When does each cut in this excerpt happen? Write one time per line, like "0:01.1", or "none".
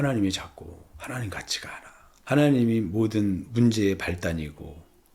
none